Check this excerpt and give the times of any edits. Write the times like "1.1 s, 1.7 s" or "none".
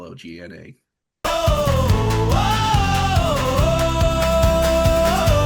1.2 s